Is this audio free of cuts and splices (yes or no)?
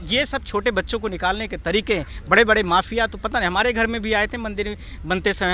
yes